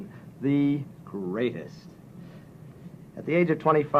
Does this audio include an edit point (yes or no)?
no